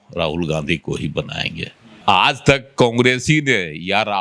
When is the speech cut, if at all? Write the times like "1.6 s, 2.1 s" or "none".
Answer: 2.0 s

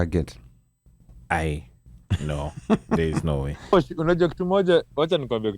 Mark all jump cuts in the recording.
3.7 s

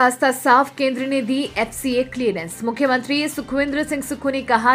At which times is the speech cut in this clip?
none

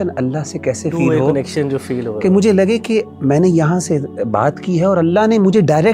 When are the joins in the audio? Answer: none

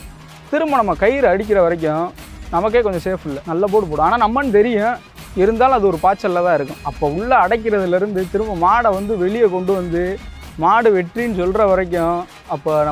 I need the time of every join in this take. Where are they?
6.8 s

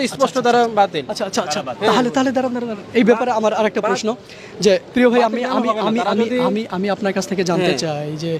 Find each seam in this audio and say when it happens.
none

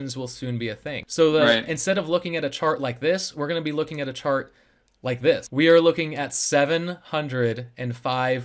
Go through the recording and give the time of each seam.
1.0 s, 5.5 s

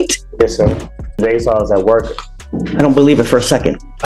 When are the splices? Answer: 1.1 s

